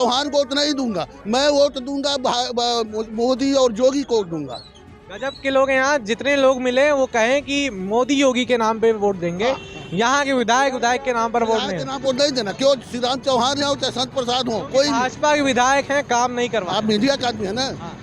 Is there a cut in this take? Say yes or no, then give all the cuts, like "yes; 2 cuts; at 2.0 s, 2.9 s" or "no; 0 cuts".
no; 0 cuts